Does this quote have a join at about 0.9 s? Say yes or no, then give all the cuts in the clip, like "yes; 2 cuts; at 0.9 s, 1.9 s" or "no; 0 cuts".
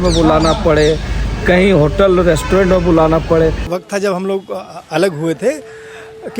no; 1 cut; at 3.7 s